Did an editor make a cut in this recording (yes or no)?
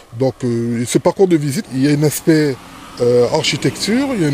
yes